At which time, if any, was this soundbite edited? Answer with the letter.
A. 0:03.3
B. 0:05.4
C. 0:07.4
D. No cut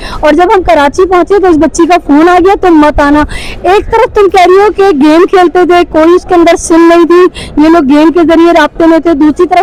D